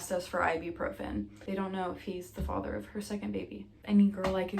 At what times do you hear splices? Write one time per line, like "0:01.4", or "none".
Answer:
0:01.4
0:03.7